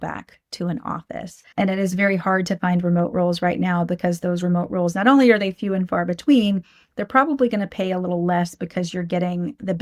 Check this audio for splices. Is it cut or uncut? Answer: cut